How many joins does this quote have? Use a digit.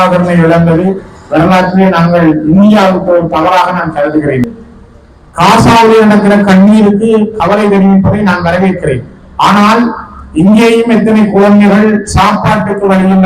1